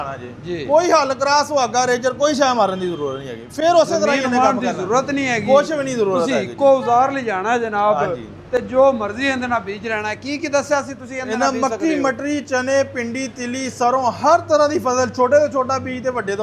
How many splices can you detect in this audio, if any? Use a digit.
0